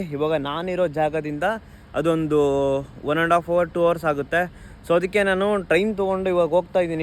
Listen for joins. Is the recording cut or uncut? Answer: uncut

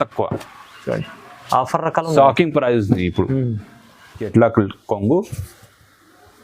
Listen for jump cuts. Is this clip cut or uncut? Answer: cut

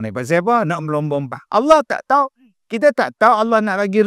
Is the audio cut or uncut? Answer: uncut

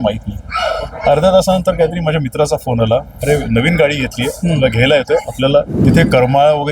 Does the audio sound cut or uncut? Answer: cut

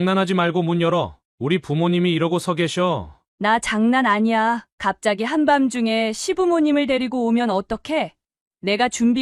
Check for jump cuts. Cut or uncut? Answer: uncut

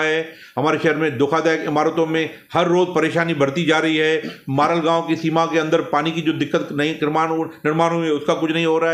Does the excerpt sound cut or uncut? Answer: uncut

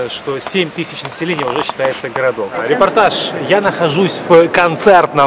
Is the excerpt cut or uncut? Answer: cut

